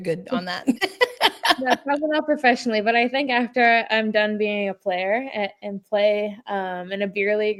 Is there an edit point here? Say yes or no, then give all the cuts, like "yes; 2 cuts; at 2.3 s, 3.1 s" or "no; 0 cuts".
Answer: no; 0 cuts